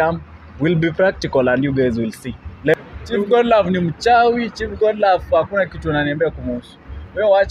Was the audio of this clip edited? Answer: yes; 1 cut; at 2.7 s

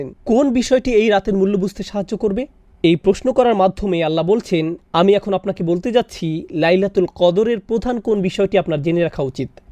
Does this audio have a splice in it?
no; 0 cuts

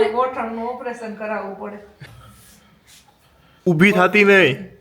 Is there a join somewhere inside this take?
yes; 2 cuts; at 2.0 s, 3.7 s

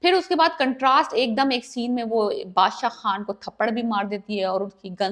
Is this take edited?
no; 0 cuts

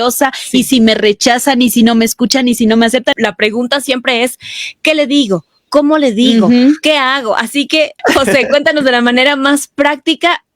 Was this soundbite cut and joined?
yes; 2 cuts; at 3.1 s, 7.9 s

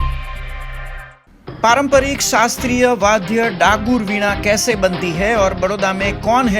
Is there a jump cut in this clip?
yes; 1 cut; at 1.0 s

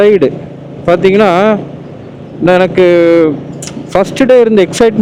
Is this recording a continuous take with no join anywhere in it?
yes; 0 cuts

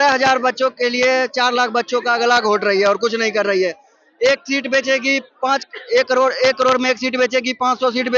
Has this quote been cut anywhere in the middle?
no; 0 cuts

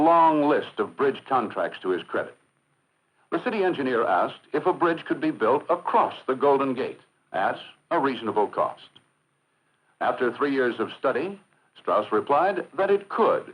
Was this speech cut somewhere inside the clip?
yes; 1 cut; at 1.7 s

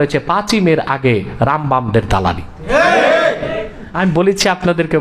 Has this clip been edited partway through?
yes; 1 cut; at 3.8 s

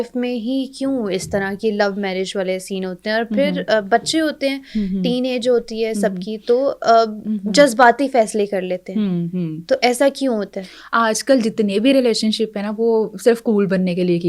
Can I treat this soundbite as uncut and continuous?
yes; 0 cuts

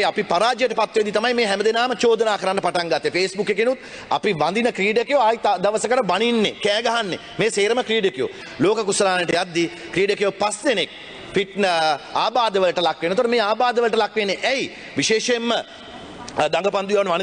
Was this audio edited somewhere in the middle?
yes; 1 cut; at 8.4 s

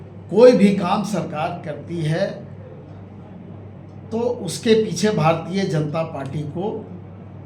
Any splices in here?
no; 0 cuts

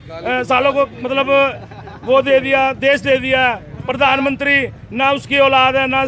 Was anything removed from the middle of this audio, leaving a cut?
no; 0 cuts

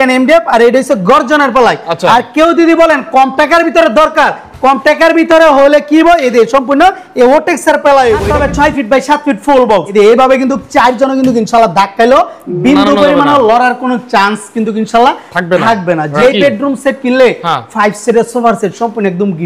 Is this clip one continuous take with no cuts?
no; 3 cuts; at 8.3 s, 9.9 s, 16.2 s

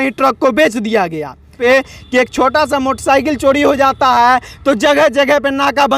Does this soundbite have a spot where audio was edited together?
yes; 1 cut; at 1.5 s

